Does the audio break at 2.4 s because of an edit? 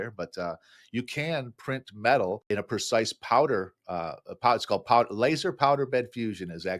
yes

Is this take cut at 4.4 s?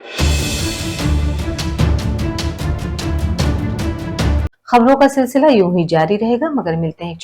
yes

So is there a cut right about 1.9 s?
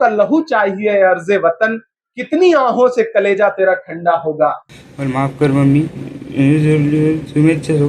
no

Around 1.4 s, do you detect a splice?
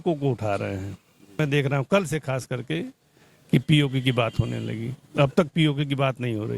yes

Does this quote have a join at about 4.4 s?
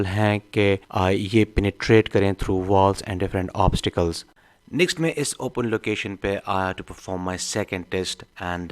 yes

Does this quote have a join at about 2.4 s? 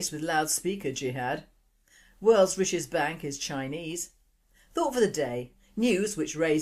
yes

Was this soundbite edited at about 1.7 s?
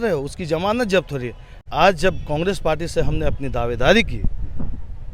yes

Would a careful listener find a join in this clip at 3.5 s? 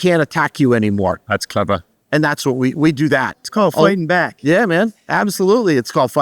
yes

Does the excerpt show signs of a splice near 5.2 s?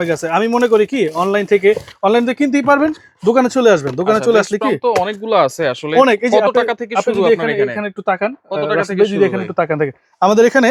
no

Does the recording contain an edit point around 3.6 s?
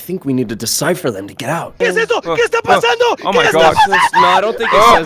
no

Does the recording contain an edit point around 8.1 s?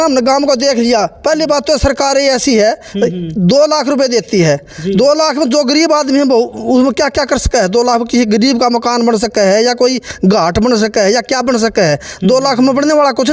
no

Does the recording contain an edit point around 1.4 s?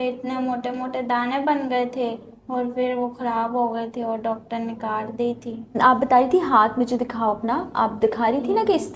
no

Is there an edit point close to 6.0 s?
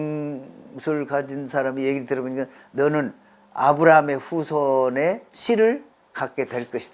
yes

